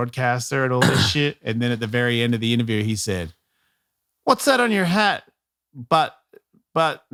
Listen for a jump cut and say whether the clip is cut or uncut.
uncut